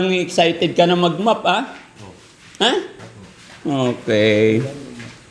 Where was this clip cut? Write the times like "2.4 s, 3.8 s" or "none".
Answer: none